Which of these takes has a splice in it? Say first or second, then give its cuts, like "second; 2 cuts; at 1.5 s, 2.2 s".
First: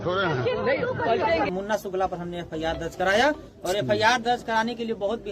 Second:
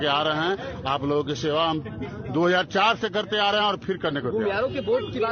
first; 1 cut; at 1.6 s